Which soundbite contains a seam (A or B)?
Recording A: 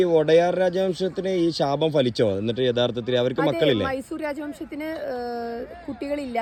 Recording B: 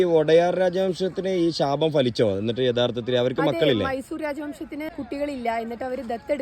B